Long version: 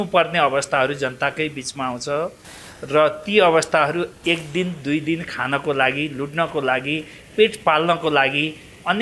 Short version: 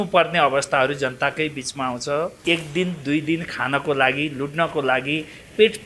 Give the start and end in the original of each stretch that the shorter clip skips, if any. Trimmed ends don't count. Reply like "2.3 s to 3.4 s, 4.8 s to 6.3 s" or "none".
2.4 s to 4.2 s